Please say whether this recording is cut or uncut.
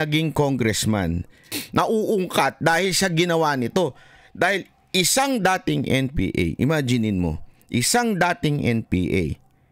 cut